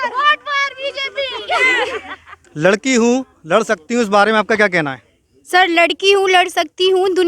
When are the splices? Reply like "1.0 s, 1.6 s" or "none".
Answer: 2.5 s